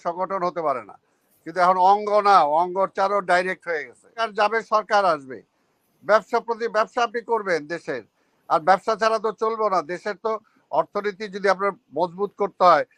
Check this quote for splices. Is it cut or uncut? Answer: cut